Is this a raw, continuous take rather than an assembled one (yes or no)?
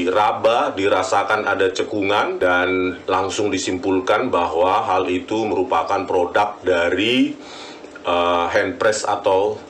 no